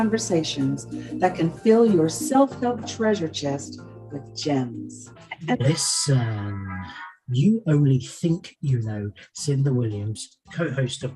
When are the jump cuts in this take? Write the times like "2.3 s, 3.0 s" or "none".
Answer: 5.5 s